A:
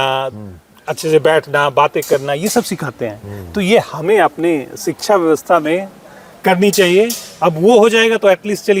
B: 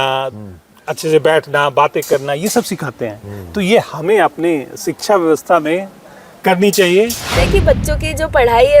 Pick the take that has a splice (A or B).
B